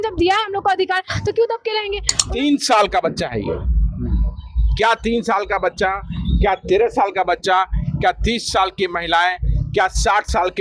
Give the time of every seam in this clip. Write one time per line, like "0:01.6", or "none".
0:02.1